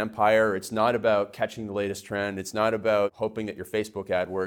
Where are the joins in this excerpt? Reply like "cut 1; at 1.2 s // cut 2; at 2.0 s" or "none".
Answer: cut 1; at 3.1 s